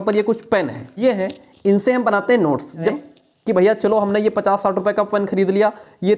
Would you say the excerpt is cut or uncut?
cut